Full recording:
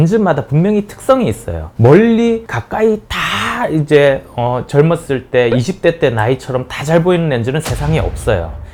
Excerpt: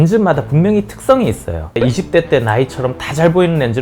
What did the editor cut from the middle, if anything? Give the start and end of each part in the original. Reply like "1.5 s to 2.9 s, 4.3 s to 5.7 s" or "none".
1.8 s to 5.5 s